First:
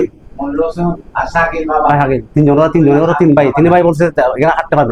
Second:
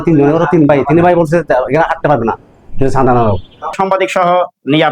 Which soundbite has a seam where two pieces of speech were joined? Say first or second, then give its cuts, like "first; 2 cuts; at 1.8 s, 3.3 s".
second; 1 cut; at 3.6 s